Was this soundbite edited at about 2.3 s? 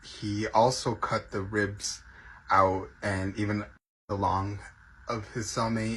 no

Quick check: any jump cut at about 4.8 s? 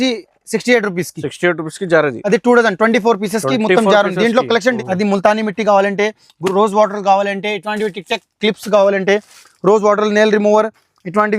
yes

